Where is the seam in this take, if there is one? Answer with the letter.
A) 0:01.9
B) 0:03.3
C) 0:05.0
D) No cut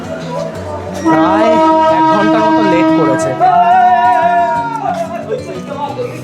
B